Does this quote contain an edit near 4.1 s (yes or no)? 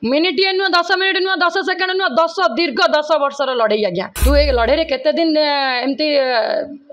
yes